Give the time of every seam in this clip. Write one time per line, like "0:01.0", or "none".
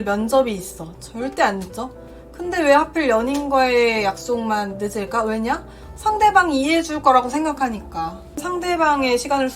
0:08.4